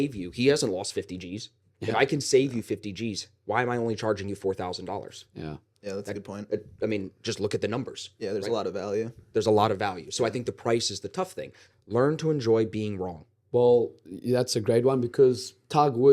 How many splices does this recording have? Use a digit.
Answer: 1